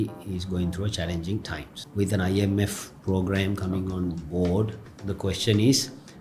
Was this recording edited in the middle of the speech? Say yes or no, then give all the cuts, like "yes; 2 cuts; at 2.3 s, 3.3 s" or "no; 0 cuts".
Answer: yes; 2 cuts; at 1.7 s, 4.9 s